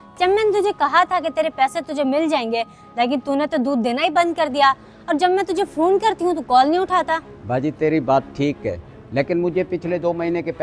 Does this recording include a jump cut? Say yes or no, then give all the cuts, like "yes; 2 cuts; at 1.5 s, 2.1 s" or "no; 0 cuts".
no; 0 cuts